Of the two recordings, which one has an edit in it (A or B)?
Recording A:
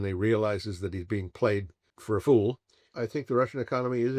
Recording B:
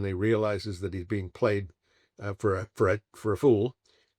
A